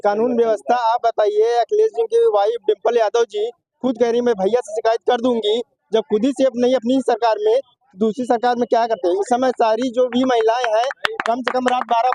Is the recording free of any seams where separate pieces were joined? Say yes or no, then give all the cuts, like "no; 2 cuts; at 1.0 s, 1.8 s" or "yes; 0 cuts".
yes; 0 cuts